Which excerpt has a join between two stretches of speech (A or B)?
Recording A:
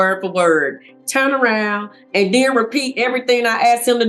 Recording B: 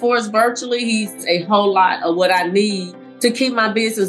B